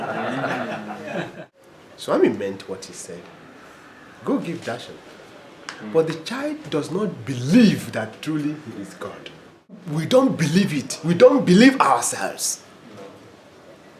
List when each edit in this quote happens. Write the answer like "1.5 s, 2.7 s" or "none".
1.5 s, 9.8 s